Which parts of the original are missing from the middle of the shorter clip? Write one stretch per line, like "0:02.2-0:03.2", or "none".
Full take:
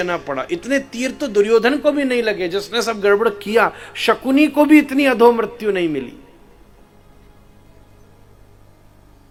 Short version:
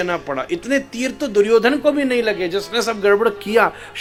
none